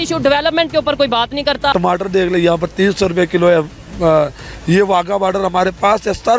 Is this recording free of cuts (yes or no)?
no